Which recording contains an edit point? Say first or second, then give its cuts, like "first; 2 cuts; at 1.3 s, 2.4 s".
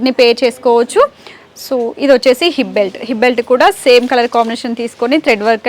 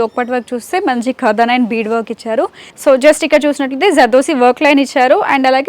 second; 1 cut; at 2.6 s